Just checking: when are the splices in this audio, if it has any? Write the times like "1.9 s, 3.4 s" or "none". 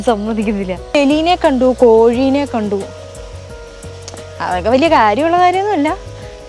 0.9 s